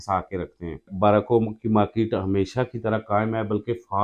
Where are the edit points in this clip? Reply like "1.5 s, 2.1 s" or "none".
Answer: 0.9 s